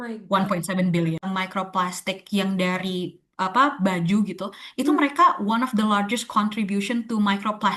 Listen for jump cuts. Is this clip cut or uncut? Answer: cut